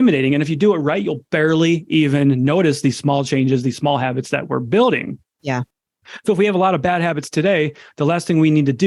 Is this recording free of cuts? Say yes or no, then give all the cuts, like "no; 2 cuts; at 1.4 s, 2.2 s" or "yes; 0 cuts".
yes; 0 cuts